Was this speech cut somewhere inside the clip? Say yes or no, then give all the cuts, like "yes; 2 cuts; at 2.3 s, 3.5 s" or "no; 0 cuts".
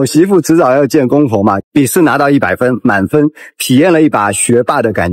yes; 1 cut; at 1.6 s